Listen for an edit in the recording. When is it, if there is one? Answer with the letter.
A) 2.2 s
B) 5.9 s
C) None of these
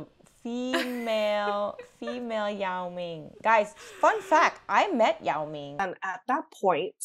B